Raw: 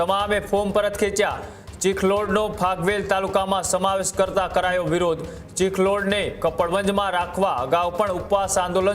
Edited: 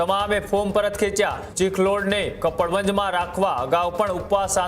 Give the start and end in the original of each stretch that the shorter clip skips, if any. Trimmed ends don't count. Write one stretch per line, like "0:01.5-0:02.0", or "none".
0:01.4-0:05.4